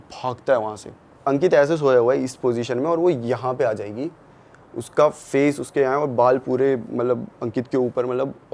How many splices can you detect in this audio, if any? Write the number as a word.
one